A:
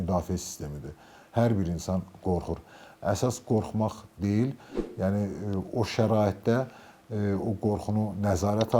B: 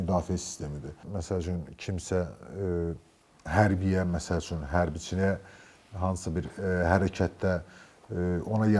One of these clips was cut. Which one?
B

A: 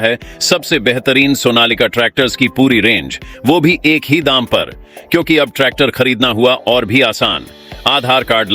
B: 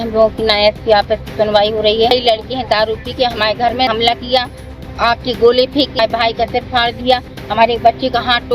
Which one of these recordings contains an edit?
B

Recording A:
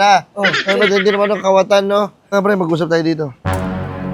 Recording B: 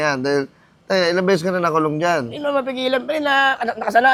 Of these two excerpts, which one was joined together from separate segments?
A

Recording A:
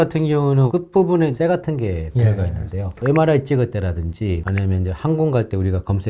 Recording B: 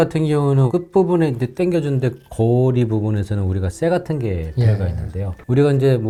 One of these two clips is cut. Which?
A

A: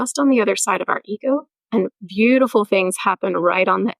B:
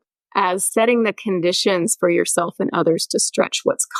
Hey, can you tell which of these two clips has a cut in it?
A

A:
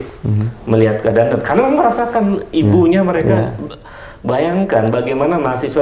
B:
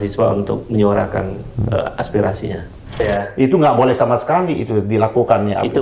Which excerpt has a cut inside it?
B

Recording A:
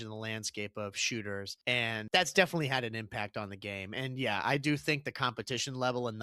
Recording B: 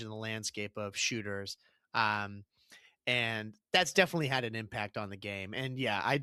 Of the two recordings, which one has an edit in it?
A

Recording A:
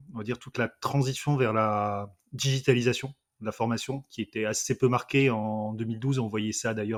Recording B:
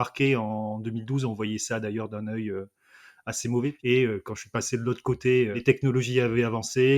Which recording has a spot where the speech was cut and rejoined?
B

